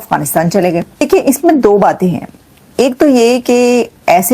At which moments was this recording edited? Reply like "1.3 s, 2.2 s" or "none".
1.0 s